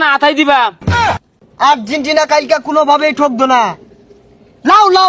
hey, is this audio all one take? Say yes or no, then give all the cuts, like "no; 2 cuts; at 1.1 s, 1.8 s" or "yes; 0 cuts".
no; 1 cut; at 1.2 s